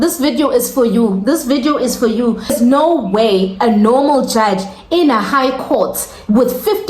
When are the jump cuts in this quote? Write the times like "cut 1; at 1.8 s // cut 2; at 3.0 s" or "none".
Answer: cut 1; at 2.5 s

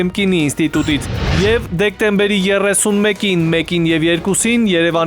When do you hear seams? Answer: cut 1; at 1.1 s

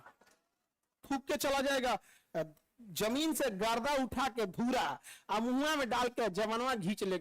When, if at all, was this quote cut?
cut 1; at 1.0 s

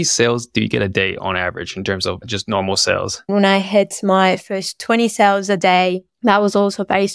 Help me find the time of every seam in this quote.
cut 1; at 3.3 s

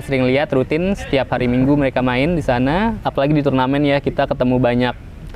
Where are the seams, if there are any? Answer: cut 1; at 3.0 s

